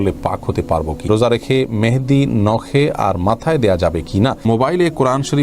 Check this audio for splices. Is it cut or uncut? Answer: cut